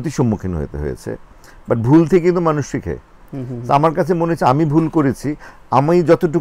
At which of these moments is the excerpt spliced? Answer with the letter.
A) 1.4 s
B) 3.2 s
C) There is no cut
C